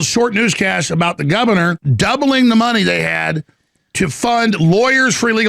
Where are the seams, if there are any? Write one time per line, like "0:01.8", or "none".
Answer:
0:01.8